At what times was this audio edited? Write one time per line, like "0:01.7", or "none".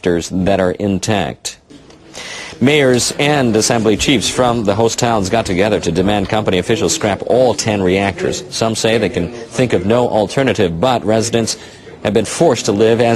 0:04.6